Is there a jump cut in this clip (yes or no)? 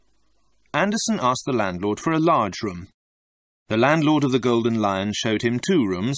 yes